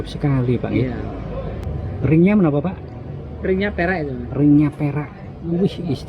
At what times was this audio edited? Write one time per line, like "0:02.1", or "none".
0:01.6